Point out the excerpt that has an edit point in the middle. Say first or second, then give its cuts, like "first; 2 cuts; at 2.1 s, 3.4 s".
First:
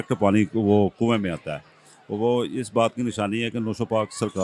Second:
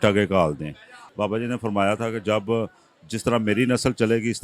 second; 1 cut; at 1.0 s